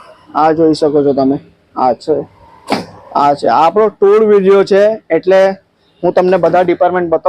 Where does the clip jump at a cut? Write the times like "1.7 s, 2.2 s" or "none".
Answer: none